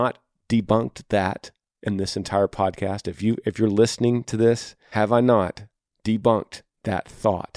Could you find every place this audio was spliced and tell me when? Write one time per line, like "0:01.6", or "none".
0:04.8